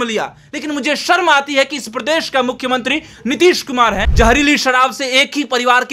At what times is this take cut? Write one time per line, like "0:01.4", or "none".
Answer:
0:04.1